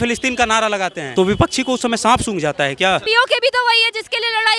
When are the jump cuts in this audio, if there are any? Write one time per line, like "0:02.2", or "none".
0:01.0
0:03.0